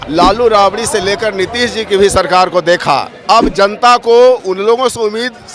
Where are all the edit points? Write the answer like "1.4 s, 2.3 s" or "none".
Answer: 3.1 s